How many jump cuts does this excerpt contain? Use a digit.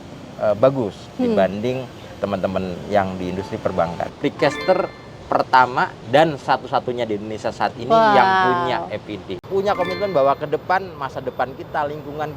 2